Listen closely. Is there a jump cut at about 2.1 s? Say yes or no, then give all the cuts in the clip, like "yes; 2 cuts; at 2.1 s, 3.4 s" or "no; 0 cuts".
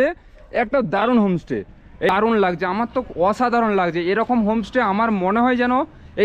yes; 1 cut; at 2.1 s